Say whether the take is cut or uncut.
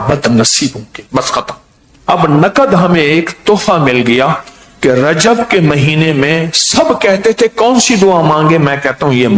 cut